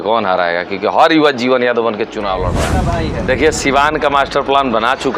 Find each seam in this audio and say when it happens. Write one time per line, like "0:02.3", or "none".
0:02.7